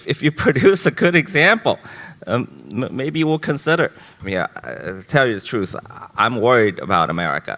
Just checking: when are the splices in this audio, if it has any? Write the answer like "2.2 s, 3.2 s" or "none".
4.1 s